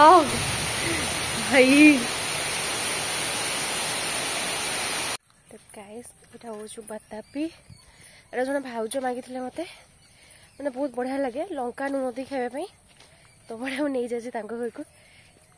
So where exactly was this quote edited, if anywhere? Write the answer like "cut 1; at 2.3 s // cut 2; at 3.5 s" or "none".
cut 1; at 5.2 s